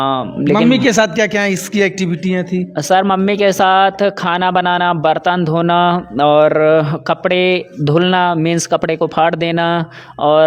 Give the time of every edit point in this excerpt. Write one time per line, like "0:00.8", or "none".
none